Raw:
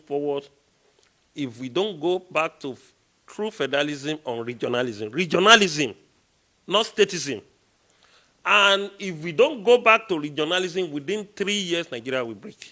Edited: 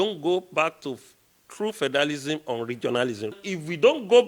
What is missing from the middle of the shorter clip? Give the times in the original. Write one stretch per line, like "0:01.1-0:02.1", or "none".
0:05.1-0:08.9